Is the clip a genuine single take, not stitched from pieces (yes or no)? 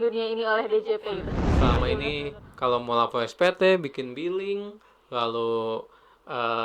no